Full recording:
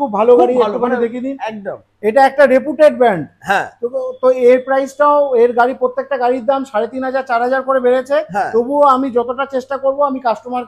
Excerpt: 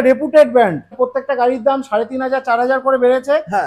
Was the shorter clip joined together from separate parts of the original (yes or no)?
yes